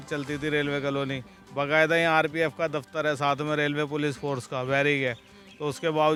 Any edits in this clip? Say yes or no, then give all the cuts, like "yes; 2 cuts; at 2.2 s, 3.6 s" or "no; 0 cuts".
no; 0 cuts